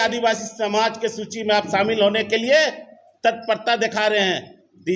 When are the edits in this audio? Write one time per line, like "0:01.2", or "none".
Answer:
none